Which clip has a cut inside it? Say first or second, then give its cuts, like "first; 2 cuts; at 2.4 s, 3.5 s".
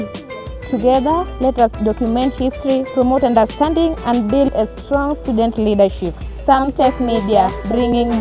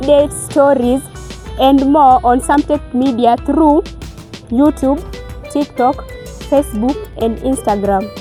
first; 1 cut; at 4.5 s